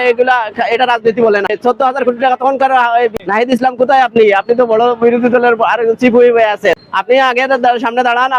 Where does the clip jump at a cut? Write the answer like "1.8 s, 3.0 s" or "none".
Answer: 1.5 s, 3.1 s, 6.9 s